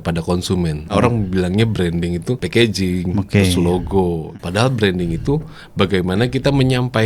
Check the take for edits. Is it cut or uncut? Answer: cut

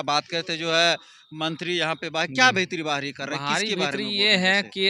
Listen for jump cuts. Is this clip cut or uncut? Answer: uncut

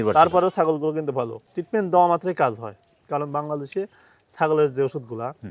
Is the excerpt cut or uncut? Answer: cut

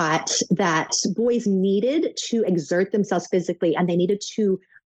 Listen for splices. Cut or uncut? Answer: cut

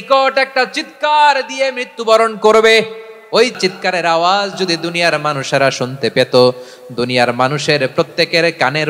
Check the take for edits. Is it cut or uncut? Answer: cut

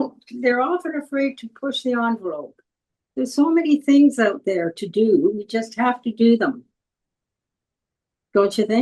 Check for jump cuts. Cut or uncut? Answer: uncut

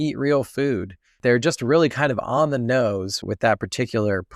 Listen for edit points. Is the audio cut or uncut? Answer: cut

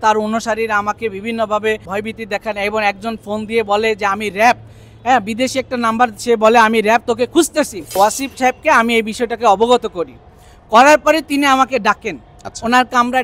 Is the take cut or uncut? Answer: cut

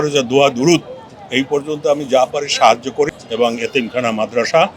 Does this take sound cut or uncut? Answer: cut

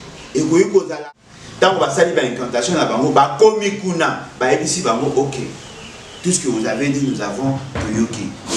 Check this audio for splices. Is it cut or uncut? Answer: cut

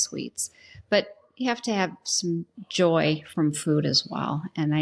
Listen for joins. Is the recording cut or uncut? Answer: uncut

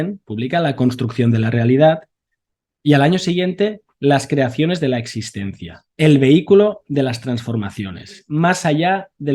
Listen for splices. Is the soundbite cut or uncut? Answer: cut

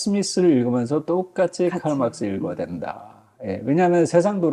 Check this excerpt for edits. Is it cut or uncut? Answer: uncut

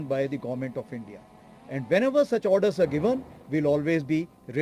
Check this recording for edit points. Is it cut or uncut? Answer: uncut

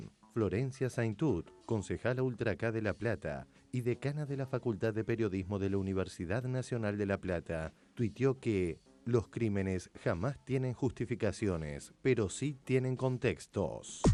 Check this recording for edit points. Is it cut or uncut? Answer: uncut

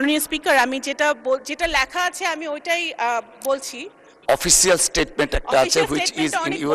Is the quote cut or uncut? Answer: uncut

